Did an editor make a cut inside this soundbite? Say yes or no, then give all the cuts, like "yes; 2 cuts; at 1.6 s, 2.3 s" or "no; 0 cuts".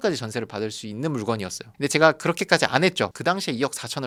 no; 0 cuts